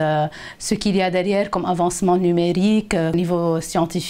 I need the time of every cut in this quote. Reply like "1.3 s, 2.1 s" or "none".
3.1 s

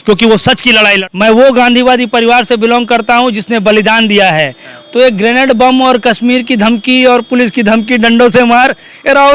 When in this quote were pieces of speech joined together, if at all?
1.0 s

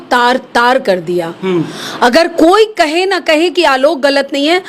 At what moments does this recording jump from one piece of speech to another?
none

